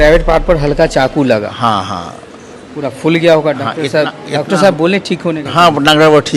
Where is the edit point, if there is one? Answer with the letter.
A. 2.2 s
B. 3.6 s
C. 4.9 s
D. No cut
D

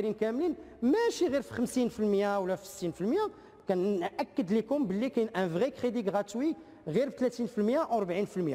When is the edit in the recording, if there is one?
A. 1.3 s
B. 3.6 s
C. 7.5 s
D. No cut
D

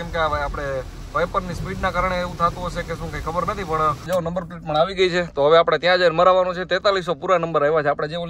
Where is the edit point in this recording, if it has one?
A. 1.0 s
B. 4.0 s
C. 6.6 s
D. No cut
B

